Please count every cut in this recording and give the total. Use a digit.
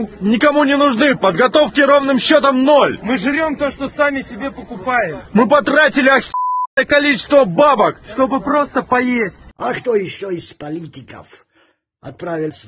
1